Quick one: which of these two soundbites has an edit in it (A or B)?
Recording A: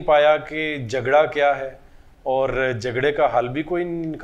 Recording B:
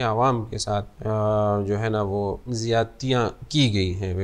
B